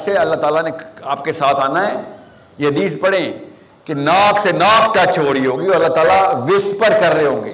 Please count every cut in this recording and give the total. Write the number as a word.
zero